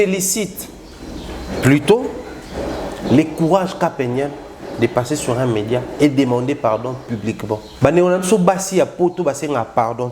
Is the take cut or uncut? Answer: cut